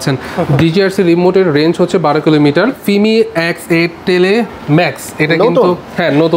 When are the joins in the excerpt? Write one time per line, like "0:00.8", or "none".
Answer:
0:02.8